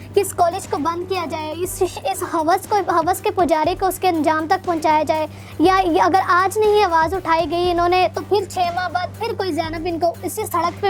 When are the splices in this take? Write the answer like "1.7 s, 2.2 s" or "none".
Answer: none